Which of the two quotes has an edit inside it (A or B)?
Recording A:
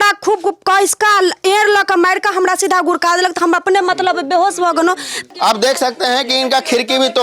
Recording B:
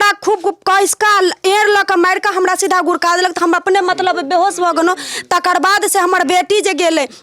A